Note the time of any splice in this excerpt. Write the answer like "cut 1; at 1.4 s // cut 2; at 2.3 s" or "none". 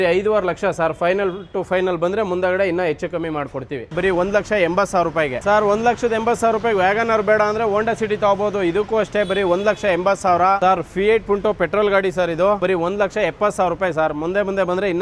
cut 1; at 3.9 s // cut 2; at 5.4 s // cut 3; at 10.6 s // cut 4; at 12.6 s